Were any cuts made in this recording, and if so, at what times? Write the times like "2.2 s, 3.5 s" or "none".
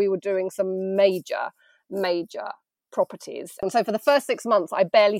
3.6 s

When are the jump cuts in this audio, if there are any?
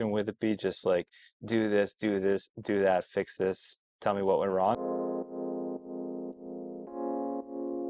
4.8 s

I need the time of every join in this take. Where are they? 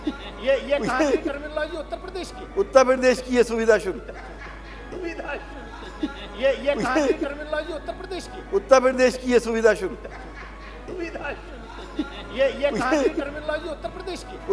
5.0 s, 10.9 s

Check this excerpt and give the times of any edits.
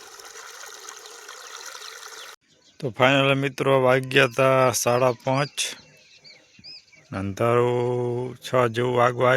2.3 s

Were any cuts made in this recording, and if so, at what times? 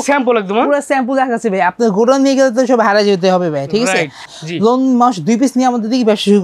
4.4 s

